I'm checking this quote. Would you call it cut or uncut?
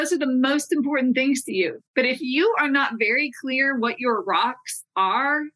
cut